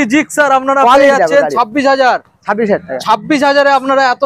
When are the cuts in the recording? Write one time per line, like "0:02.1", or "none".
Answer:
none